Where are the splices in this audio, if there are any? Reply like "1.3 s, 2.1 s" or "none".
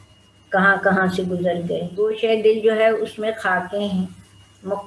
2.0 s